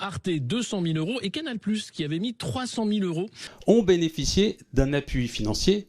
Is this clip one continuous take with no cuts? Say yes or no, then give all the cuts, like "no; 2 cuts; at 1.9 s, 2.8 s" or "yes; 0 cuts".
no; 1 cut; at 3.5 s